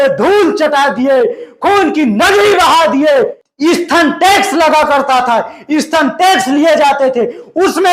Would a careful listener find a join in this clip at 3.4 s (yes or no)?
yes